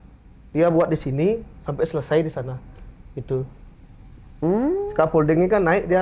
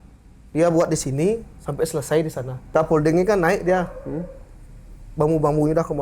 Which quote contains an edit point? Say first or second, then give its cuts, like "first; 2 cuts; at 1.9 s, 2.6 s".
second; 1 cut; at 2.7 s